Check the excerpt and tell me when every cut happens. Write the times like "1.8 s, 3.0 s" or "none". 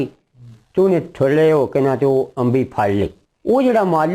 none

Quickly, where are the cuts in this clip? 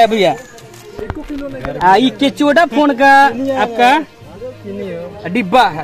none

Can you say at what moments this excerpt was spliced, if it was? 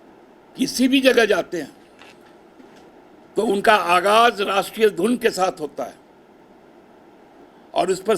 2.9 s, 7.4 s

